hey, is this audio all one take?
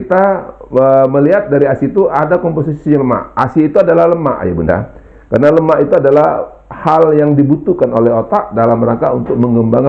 yes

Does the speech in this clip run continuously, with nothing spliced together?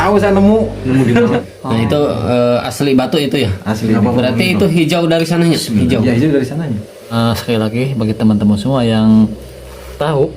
no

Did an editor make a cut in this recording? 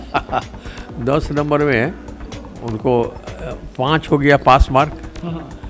no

